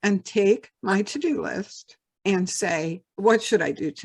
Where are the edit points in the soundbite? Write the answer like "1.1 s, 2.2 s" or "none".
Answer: 3.1 s